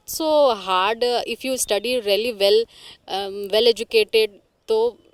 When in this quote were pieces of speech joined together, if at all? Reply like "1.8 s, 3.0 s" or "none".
none

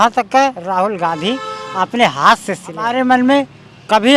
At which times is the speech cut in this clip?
2.8 s

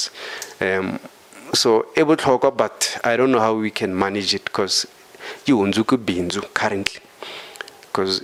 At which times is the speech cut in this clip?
none

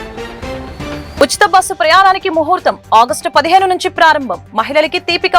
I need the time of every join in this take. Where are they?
1.1 s

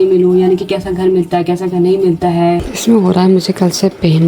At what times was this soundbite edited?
2.7 s

